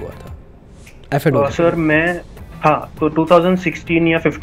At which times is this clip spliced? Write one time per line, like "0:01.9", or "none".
none